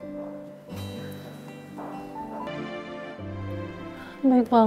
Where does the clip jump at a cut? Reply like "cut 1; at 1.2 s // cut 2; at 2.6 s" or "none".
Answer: cut 1; at 2.5 s